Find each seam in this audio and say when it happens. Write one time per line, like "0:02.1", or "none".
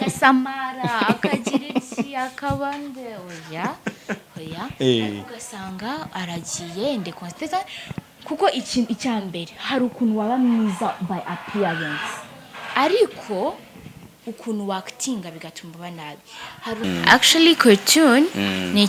0:16.8

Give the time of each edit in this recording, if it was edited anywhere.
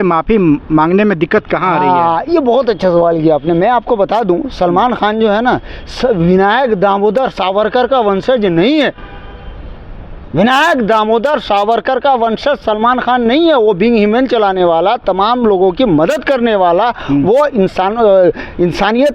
none

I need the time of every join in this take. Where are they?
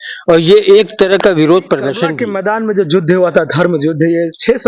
0:02.3

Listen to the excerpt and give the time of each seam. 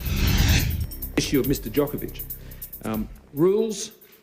0:01.0

